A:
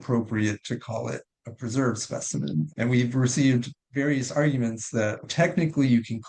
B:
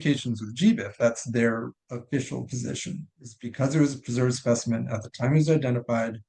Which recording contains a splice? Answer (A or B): A